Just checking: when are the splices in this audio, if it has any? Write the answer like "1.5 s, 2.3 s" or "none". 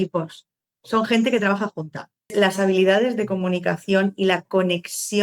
2.3 s